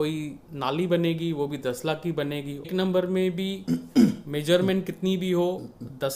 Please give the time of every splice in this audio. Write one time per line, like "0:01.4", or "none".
0:02.7